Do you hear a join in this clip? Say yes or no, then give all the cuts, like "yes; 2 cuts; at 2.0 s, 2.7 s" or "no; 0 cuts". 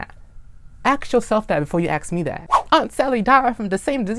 yes; 1 cut; at 2.5 s